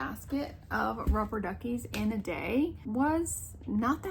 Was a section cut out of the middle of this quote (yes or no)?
yes